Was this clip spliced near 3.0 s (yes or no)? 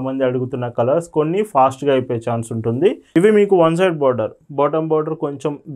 yes